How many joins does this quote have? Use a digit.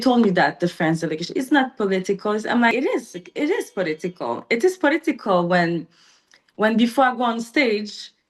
1